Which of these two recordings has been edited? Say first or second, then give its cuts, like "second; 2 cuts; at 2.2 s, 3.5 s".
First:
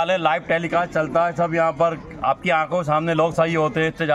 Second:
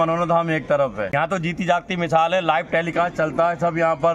second; 1 cut; at 1.1 s